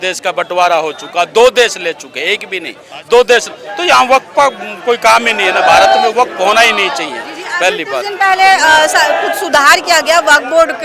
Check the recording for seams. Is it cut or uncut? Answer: uncut